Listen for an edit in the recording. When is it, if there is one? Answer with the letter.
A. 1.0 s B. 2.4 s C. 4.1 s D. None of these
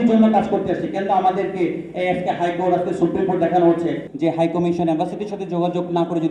C